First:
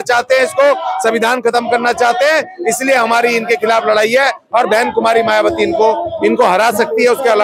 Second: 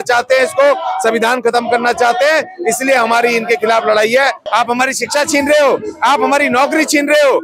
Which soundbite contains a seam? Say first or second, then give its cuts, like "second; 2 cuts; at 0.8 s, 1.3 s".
second; 1 cut; at 4.4 s